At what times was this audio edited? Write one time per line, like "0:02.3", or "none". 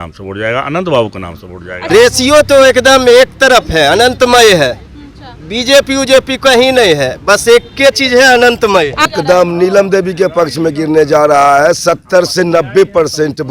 0:01.9
0:09.1